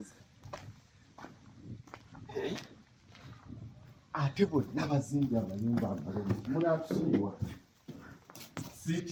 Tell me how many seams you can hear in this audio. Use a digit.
0